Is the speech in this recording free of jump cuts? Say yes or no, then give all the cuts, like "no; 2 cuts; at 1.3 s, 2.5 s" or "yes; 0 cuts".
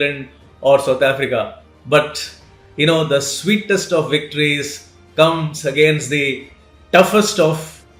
yes; 0 cuts